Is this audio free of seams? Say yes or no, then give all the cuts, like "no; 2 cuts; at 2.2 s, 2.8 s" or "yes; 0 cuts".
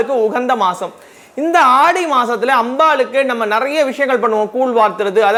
yes; 0 cuts